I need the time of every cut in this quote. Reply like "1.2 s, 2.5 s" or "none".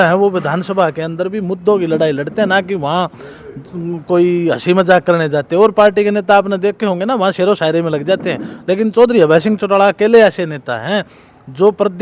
none